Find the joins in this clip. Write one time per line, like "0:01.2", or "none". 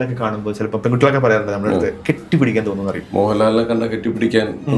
0:02.0
0:03.0